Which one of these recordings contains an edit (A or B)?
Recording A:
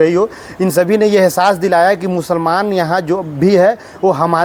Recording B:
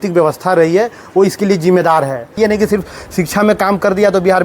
B